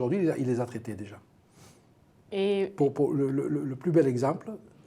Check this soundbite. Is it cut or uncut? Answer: cut